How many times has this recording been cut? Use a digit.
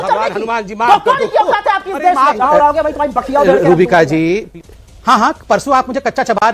1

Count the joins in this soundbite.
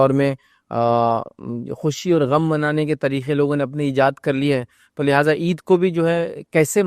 0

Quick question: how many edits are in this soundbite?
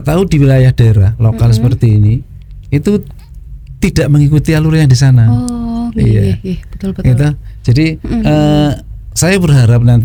0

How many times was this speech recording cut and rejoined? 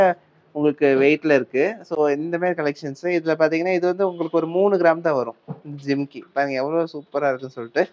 0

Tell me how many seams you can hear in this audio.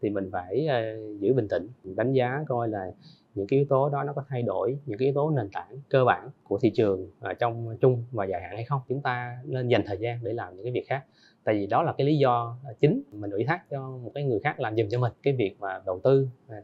5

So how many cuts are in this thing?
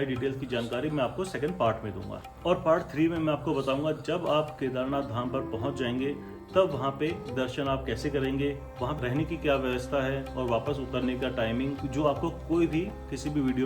1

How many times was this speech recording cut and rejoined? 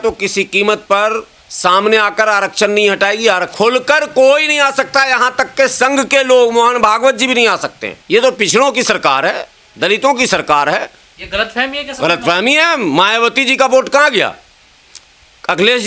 2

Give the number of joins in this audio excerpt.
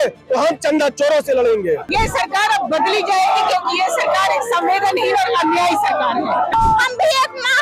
2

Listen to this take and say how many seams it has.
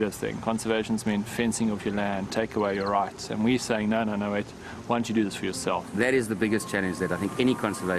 0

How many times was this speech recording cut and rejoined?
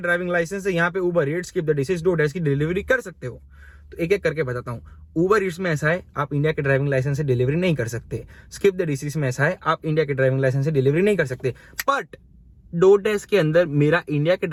0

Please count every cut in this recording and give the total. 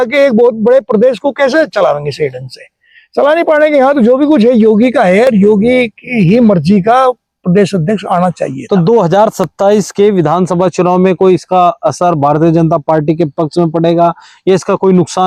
0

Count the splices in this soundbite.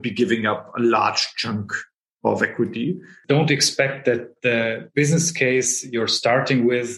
1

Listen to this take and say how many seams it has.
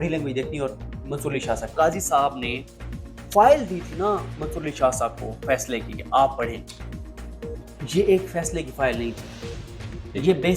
1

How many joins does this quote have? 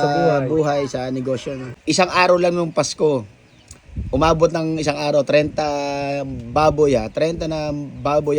1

